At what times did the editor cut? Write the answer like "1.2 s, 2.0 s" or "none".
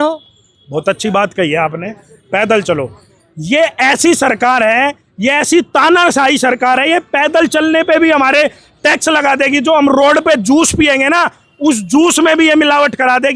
none